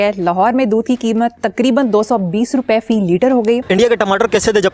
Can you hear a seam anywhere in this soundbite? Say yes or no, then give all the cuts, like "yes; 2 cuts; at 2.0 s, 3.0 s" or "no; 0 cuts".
yes; 1 cut; at 3.6 s